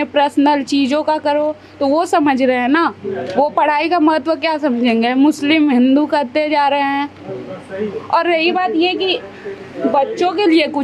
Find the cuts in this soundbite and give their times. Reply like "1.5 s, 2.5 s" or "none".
none